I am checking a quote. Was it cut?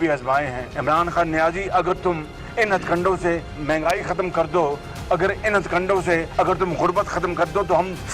no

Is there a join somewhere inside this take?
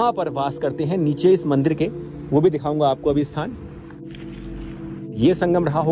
no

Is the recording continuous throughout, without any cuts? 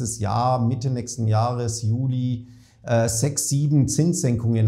yes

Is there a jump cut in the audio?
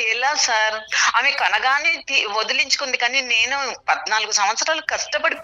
yes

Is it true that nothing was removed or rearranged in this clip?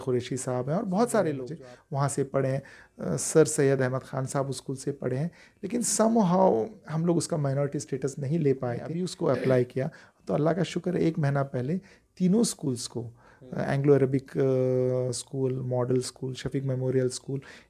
no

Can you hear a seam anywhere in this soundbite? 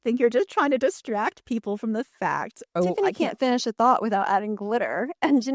yes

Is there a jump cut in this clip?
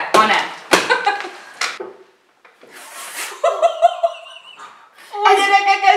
yes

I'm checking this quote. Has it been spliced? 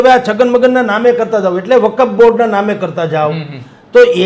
no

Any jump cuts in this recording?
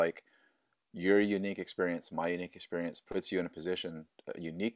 no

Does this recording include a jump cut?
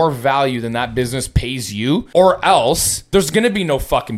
yes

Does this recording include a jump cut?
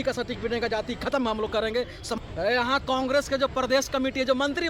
yes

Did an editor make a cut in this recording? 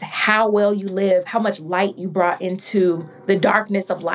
yes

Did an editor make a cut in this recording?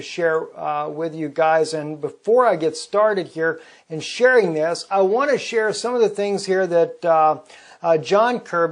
no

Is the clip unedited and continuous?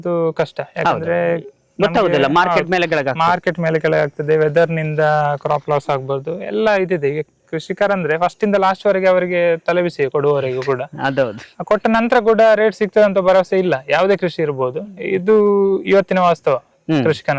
yes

